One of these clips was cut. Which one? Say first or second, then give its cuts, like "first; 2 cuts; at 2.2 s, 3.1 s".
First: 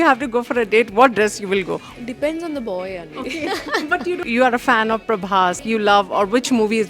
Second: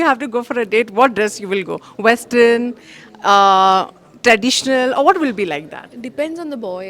first; 3 cuts; at 1.8 s, 4.2 s, 5.6 s